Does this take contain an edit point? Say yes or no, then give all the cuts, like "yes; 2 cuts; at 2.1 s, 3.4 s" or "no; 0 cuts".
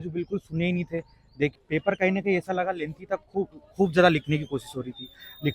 yes; 1 cut; at 1.5 s